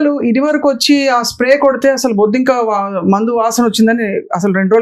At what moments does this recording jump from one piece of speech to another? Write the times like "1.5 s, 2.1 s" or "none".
none

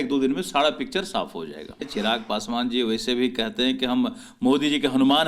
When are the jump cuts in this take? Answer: 1.9 s

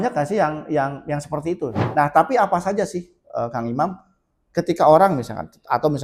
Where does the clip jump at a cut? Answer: 1.8 s

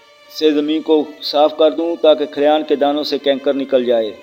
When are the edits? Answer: none

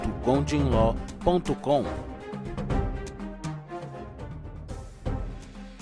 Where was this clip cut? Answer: 4.9 s

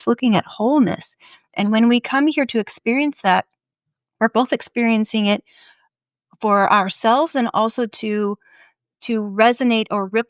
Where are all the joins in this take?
none

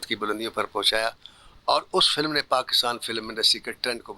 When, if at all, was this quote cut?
none

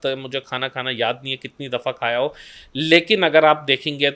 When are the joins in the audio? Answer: none

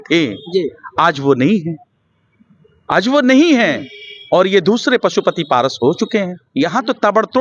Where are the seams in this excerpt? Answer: 6.4 s

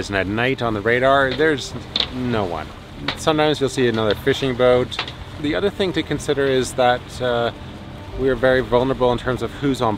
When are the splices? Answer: 5.3 s

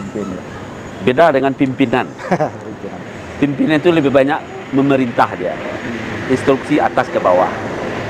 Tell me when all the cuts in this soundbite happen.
none

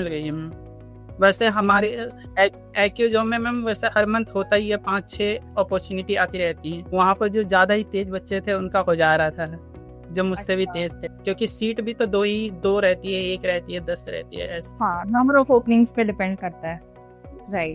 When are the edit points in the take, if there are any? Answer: 6.7 s, 11.1 s

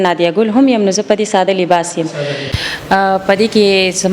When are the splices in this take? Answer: 2.6 s

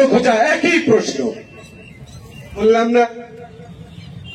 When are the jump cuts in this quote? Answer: 2.6 s

